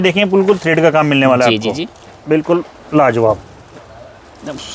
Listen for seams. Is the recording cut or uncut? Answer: uncut